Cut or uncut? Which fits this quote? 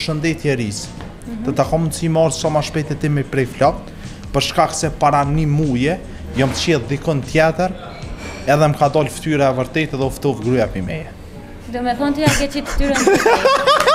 uncut